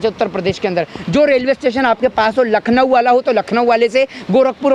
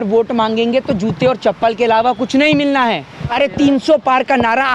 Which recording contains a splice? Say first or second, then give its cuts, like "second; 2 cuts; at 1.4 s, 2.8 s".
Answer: second; 1 cut; at 3.2 s